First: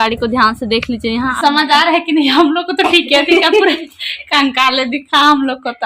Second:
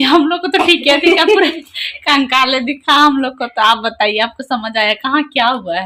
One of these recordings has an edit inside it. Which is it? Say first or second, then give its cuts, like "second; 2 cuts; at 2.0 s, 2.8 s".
first; 1 cut; at 1.3 s